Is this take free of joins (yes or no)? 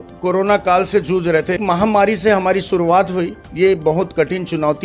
no